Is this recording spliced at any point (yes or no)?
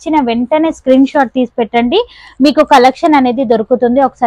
no